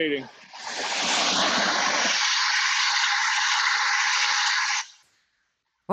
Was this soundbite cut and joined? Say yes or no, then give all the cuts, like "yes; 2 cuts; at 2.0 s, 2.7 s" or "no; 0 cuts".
no; 0 cuts